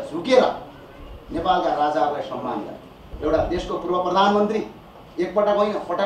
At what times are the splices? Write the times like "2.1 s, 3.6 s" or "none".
3.0 s